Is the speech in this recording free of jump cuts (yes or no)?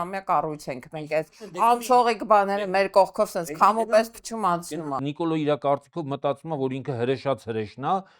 no